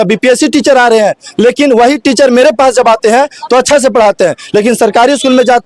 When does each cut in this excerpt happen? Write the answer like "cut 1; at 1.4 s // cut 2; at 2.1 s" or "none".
none

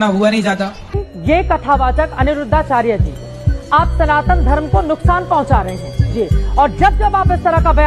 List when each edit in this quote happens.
cut 1; at 1.0 s

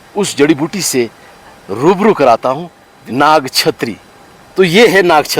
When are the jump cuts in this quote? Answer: cut 1; at 2.4 s

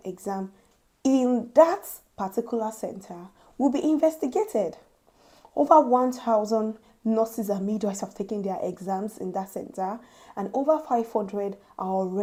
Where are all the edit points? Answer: none

